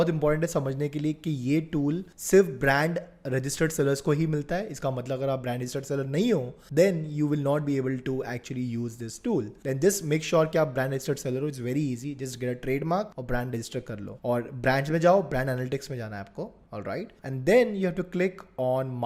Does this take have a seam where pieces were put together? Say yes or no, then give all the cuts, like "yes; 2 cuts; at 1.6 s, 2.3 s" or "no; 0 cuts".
no; 0 cuts